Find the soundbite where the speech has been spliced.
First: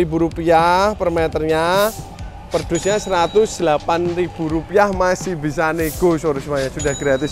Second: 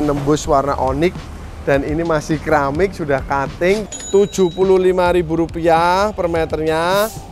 second; 1 cut; at 3.9 s

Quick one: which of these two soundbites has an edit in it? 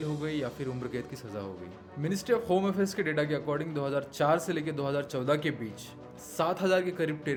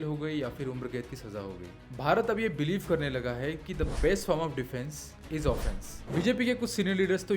second; 2 cuts; at 1.8 s, 6.0 s

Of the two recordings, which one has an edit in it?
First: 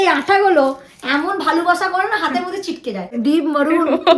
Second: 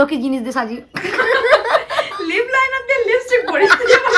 first; 1 cut; at 3.1 s

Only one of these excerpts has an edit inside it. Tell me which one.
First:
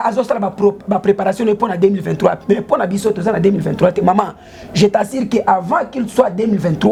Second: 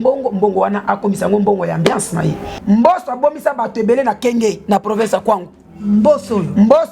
second; 1 cut; at 2.5 s

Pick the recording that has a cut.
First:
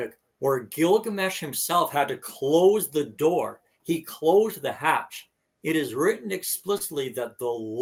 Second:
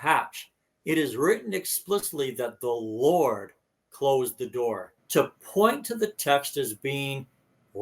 second; 1 cut; at 4.9 s

